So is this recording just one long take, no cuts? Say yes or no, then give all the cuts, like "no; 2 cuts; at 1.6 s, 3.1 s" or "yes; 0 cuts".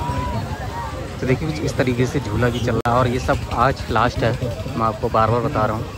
yes; 0 cuts